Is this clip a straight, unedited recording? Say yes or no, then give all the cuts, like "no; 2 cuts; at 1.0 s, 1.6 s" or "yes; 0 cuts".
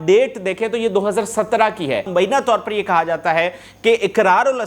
no; 1 cut; at 2.1 s